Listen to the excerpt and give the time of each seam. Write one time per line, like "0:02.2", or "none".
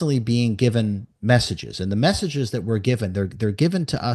none